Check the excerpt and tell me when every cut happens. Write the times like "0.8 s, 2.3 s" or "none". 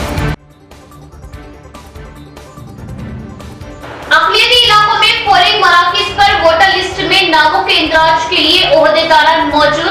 none